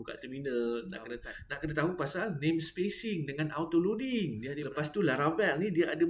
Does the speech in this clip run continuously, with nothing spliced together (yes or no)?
no